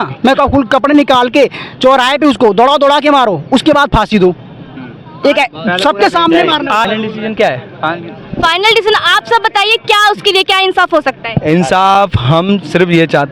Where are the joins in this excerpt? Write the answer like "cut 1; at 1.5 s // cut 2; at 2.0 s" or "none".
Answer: cut 1; at 6.9 s